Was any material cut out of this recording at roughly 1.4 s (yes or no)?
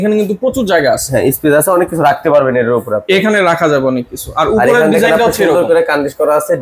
no